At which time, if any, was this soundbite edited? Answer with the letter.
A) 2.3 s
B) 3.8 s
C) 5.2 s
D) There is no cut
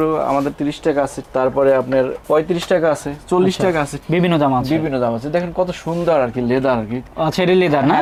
D